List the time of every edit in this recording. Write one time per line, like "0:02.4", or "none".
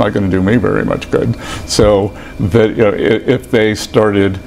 none